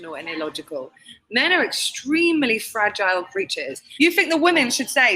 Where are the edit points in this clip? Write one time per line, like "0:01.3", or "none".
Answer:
0:03.9